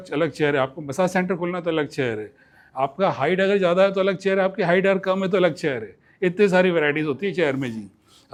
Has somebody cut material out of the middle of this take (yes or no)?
no